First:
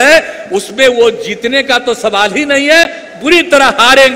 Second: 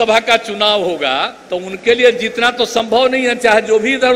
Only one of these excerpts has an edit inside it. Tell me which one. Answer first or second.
second